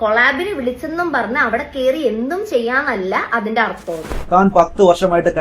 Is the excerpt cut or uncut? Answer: cut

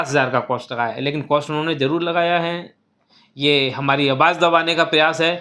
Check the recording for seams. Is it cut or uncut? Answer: uncut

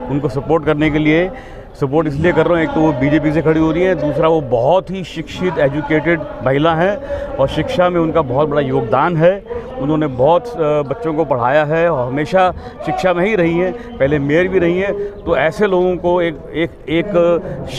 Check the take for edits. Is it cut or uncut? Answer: uncut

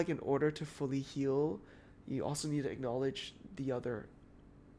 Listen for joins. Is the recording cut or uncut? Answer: uncut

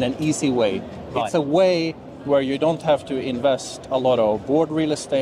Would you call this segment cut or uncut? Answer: uncut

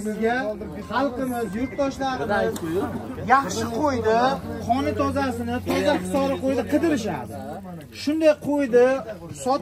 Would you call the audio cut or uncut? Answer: uncut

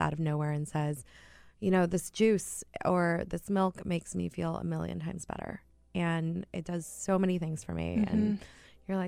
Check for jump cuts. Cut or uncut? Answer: uncut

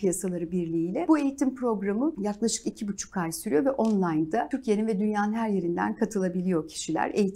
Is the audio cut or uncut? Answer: cut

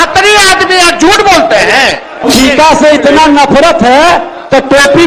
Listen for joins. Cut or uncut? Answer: uncut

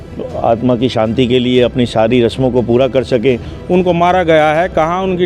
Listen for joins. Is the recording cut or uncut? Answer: cut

